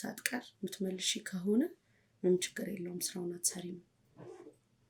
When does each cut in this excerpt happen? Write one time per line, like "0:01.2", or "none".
none